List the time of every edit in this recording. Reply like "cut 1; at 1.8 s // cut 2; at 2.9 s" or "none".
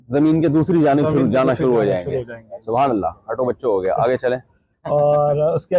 none